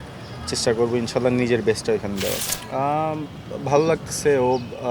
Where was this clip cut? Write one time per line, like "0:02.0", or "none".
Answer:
0:02.5